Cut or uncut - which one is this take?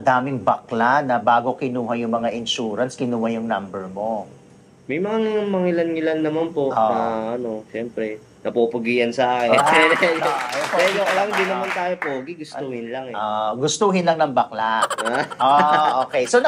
uncut